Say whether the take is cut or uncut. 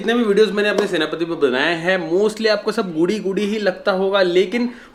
uncut